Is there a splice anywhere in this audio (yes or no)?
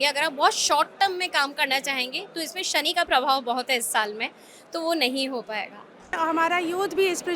yes